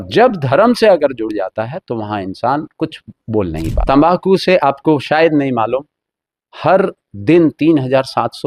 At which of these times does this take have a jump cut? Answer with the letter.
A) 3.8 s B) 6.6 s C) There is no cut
A